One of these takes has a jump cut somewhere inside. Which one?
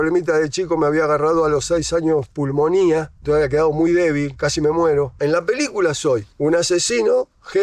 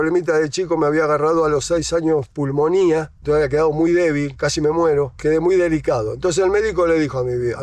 first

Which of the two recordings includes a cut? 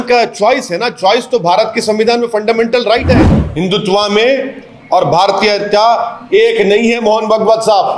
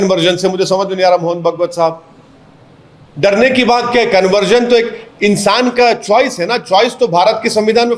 first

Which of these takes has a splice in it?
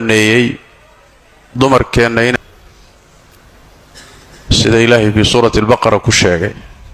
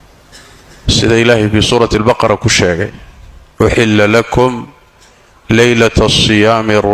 first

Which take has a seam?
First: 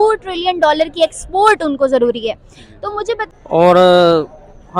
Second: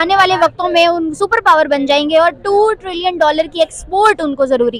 first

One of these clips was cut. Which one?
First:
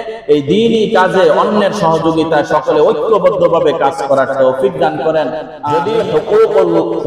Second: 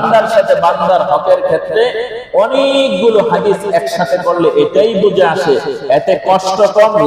first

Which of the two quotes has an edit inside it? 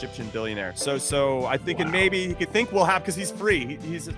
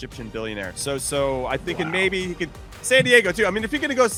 first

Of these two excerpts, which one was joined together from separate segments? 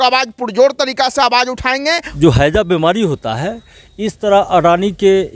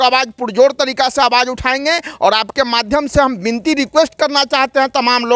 first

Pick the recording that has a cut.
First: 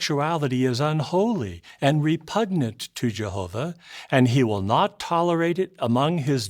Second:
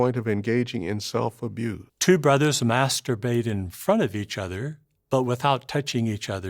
second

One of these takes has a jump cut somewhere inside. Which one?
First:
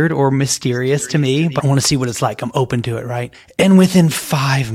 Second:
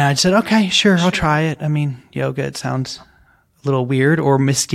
first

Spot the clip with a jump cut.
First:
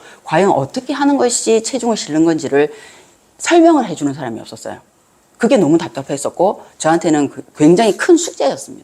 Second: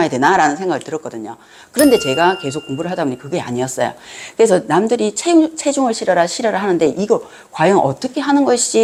first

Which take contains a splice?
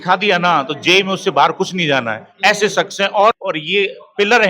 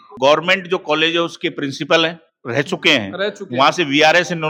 first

